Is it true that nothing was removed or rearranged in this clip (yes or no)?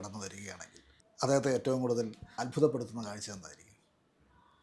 no